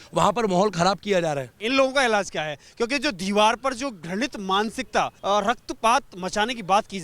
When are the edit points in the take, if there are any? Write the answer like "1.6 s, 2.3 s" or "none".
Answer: 1.6 s, 5.2 s